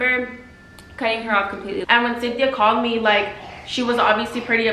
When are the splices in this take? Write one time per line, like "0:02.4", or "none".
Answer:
0:01.8